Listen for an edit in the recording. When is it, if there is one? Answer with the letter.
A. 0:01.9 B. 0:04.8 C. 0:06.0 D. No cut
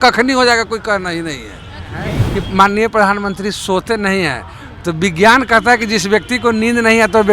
A